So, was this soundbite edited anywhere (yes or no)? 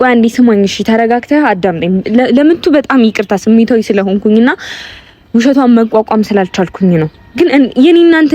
no